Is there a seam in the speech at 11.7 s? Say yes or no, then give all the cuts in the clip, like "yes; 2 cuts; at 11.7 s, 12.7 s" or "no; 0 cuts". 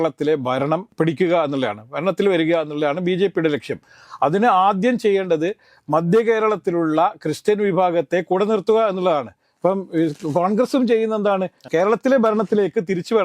yes; 1 cut; at 11.7 s